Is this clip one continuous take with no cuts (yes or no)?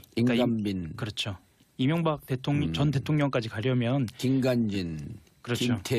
no